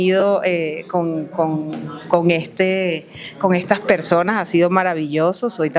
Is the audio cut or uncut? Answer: uncut